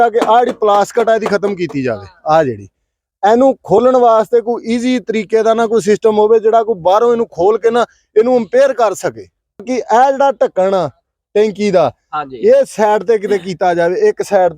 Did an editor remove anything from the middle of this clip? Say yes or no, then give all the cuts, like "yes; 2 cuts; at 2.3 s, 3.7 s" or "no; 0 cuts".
yes; 1 cut; at 9.7 s